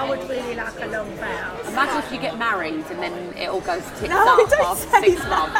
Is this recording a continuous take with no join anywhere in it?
no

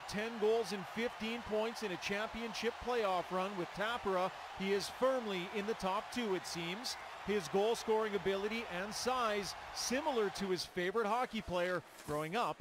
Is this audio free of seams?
yes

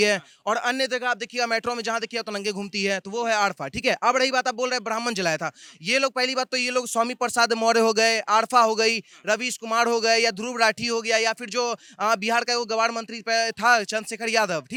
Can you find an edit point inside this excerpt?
no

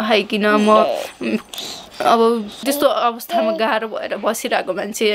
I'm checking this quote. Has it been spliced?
yes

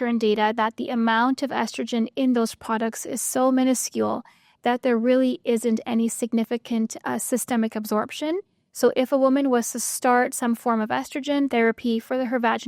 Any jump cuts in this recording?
yes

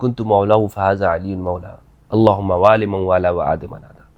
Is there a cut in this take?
no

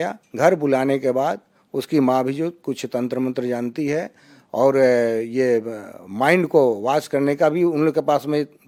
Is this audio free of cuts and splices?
yes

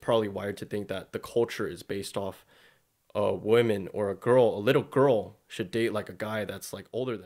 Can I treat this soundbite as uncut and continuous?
yes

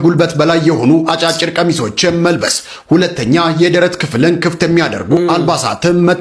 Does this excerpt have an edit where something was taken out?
no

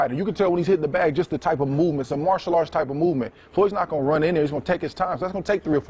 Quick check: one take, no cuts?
yes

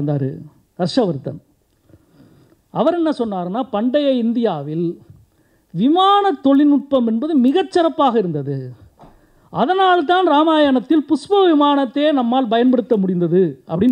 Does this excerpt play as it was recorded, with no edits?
yes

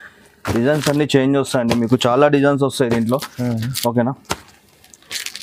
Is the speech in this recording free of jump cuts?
yes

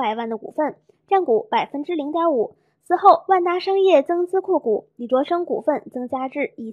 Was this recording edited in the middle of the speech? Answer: yes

